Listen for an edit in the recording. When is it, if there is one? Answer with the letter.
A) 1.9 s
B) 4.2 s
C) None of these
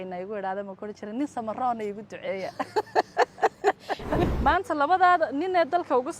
B